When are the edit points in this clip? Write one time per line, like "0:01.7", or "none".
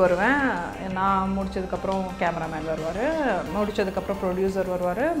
none